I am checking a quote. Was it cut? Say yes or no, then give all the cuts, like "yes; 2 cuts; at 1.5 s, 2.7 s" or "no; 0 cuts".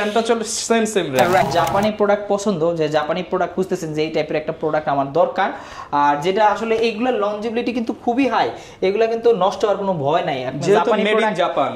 yes; 1 cut; at 1.5 s